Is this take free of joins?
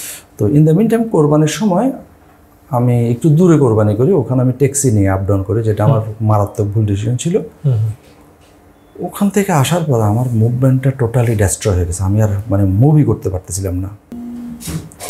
no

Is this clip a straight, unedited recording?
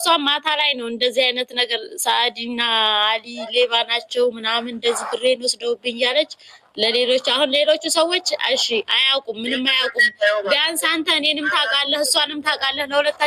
yes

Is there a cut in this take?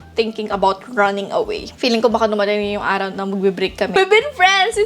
yes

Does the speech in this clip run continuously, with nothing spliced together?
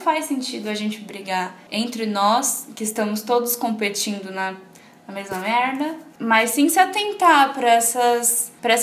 no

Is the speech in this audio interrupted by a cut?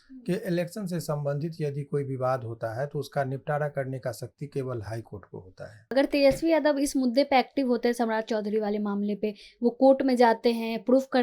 yes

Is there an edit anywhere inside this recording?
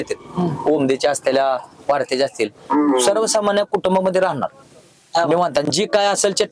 no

